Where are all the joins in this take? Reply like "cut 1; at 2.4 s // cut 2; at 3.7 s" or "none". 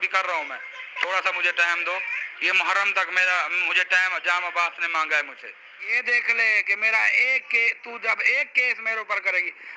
cut 1; at 5.9 s